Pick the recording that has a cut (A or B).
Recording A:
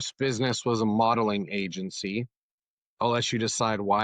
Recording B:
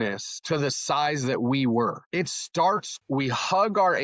B